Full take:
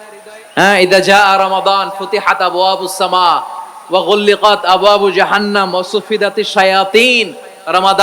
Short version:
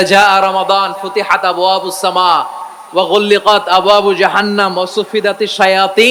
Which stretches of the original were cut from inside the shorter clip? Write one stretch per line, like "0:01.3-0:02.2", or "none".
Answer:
none